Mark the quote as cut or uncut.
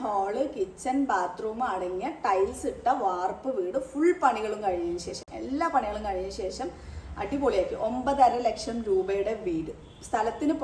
uncut